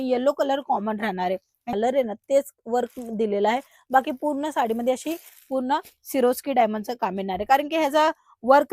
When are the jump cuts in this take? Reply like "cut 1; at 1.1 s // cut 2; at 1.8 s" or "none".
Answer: cut 1; at 1.6 s